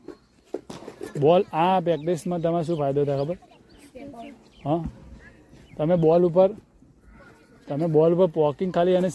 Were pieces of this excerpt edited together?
no; 0 cuts

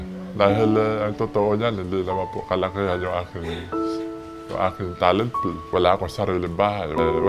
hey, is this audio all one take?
no; 1 cut; at 5.6 s

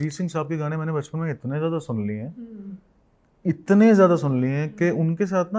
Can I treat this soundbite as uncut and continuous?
yes; 0 cuts

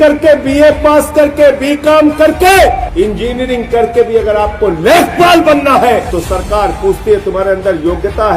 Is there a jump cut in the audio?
yes; 2 cuts; at 2.9 s, 6.1 s

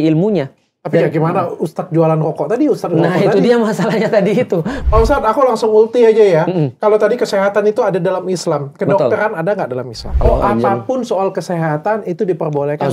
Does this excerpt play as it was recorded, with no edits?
no; 2 cuts; at 4.8 s, 10.1 s

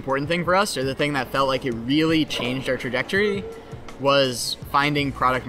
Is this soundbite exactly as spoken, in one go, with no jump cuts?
yes; 0 cuts

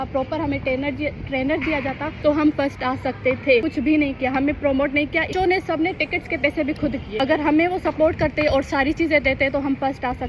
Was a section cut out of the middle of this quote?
yes; 4 cuts; at 2.1 s, 3.7 s, 5.3 s, 7.1 s

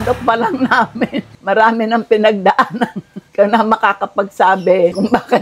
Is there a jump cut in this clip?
no; 0 cuts

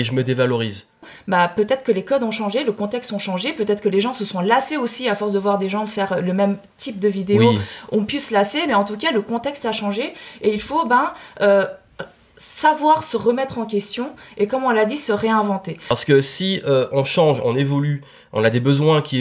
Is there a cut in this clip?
yes; 2 cuts; at 1.1 s, 15.7 s

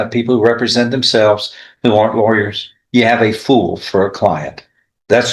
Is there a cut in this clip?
no; 0 cuts

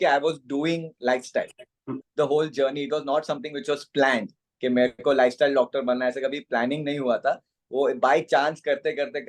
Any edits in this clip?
yes; 1 cut; at 2.0 s

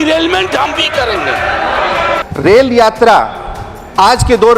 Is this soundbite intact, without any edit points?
no; 1 cut; at 2.2 s

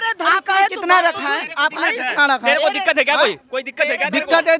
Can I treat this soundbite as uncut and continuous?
yes; 0 cuts

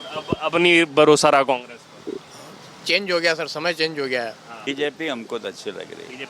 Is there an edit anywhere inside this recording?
yes; 1 cut; at 4.7 s

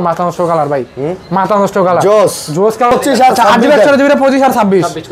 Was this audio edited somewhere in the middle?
yes; 1 cut; at 2.9 s

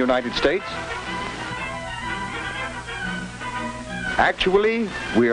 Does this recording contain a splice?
no; 0 cuts

